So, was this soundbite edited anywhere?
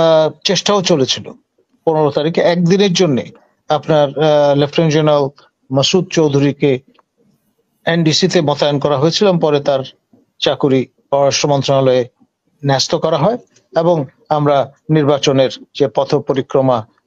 no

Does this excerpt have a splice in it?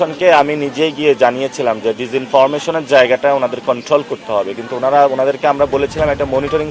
no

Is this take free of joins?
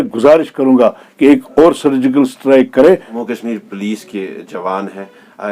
no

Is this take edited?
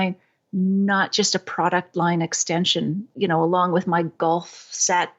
yes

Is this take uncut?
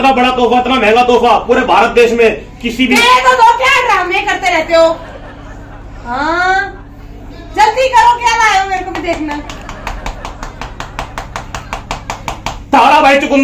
yes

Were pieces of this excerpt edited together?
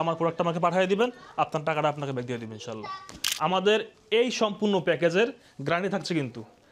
yes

